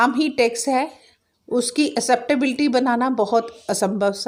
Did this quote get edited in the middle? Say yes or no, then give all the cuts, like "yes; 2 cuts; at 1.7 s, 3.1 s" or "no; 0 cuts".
no; 0 cuts